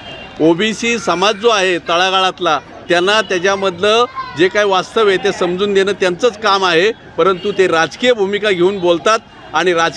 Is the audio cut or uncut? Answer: uncut